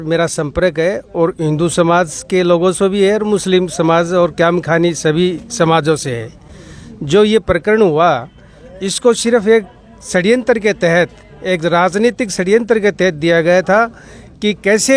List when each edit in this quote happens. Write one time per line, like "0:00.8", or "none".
none